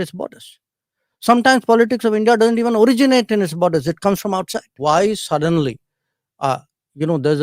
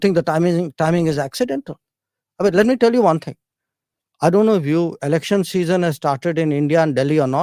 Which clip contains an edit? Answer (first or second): first